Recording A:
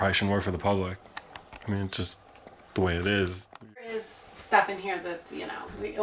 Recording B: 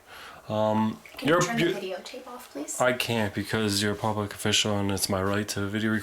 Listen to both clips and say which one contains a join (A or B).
A